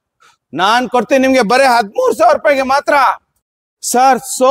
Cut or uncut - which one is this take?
uncut